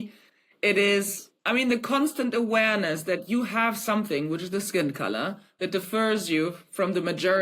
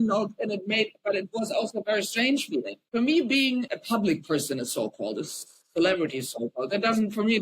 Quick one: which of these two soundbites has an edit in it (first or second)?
second